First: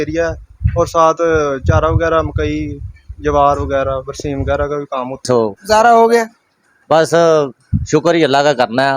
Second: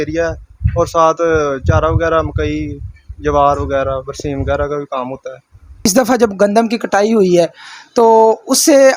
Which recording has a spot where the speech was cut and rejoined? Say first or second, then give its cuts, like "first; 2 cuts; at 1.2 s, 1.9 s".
first; 1 cut; at 5.2 s